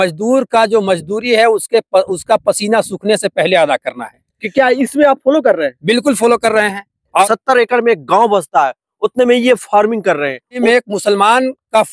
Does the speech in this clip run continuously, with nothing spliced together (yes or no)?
no